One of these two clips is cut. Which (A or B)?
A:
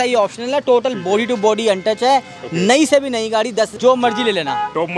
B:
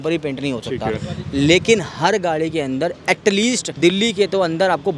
A